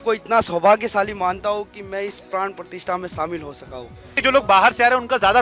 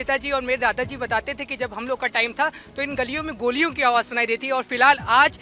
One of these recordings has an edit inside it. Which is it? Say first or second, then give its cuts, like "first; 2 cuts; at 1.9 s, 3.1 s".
first; 1 cut; at 4.2 s